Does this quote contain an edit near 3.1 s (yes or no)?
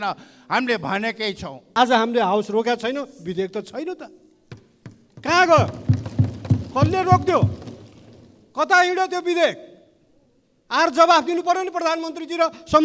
no